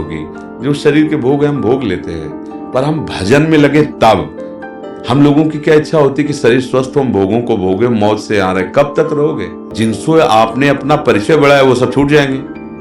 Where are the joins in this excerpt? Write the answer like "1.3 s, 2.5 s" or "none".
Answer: 9.6 s